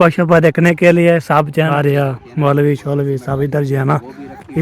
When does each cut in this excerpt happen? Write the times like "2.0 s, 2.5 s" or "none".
1.7 s